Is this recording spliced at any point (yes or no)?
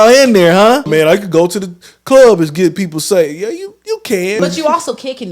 yes